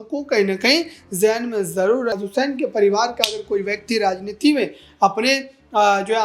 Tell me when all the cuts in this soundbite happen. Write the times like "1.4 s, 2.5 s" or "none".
2.2 s